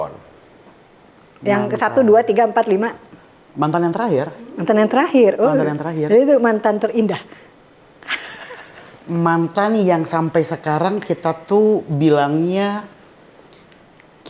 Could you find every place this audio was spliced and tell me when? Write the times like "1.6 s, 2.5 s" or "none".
none